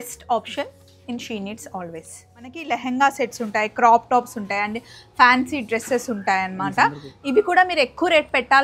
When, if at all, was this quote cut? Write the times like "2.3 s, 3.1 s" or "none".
2.6 s